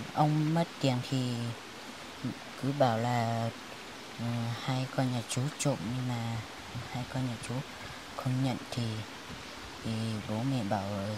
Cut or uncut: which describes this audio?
uncut